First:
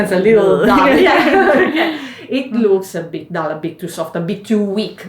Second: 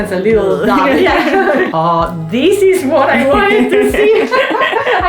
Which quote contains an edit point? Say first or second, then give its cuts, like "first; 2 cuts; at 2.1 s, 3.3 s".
second; 1 cut; at 1.7 s